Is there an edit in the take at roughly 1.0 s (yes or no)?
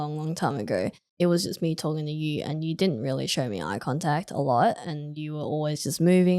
yes